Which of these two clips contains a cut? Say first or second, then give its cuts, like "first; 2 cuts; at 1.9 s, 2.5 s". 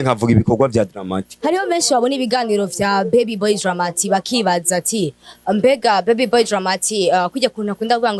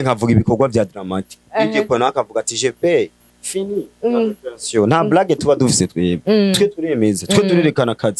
first; 1 cut; at 1.3 s